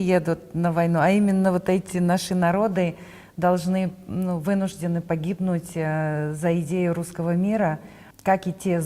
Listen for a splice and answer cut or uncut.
uncut